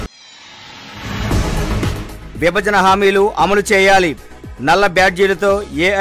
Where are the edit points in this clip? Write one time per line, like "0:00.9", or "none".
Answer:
none